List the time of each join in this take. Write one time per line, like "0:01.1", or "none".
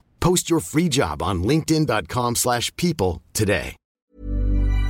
0:03.9